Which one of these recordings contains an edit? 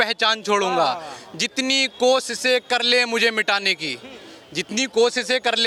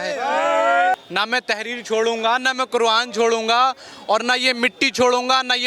second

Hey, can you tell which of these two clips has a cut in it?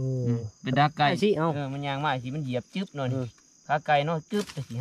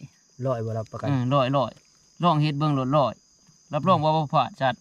first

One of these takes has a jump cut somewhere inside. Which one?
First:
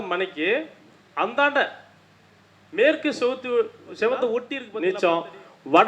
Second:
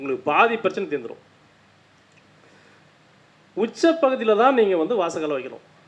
first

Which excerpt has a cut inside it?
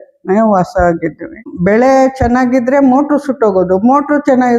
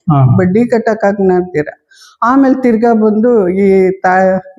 first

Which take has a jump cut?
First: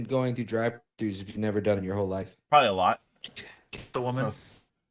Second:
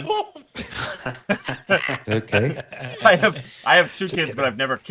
first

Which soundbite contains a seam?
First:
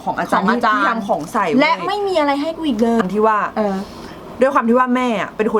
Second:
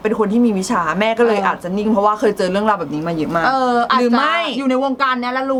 first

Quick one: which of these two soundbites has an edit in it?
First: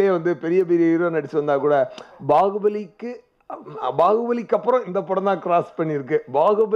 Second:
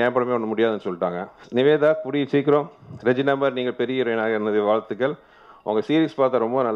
second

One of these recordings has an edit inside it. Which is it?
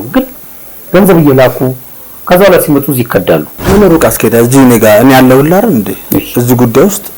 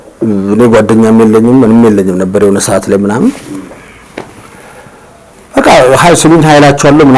first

